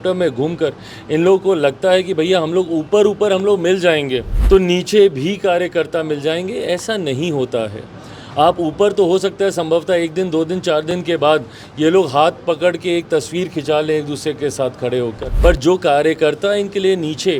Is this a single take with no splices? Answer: no; 2 cuts; at 4.3 s, 15.3 s

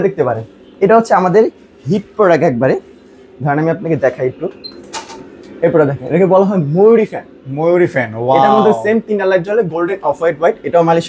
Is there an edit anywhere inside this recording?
no; 0 cuts

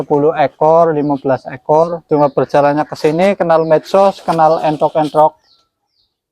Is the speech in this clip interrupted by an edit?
yes; 1 cut; at 2.0 s

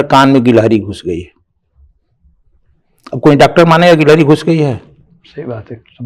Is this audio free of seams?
yes; 0 cuts

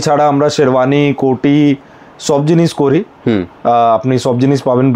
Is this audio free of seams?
yes; 0 cuts

